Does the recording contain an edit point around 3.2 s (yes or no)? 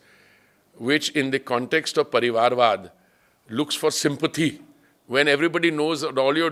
no